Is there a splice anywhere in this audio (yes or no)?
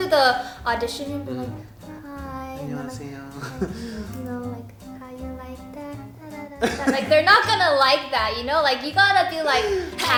no